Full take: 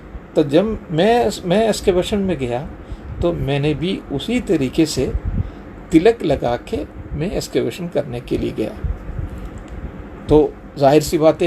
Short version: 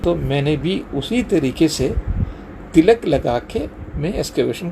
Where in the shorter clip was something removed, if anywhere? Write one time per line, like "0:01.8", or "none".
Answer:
none